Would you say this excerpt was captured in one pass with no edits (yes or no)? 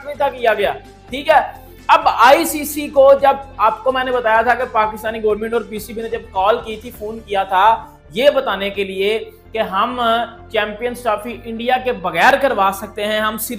yes